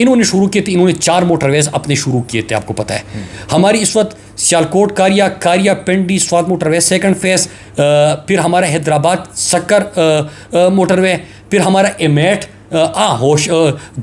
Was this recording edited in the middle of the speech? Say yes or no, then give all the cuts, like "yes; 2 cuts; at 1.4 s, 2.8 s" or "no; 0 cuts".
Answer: no; 0 cuts